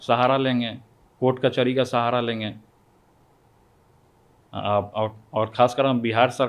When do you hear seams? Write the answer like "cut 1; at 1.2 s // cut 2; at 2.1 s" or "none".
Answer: none